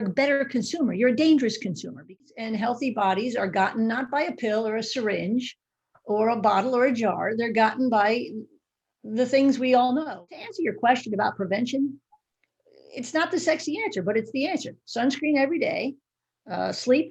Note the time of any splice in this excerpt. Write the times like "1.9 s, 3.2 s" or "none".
2.2 s, 10.4 s